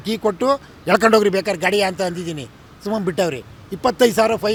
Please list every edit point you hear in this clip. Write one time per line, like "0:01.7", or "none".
none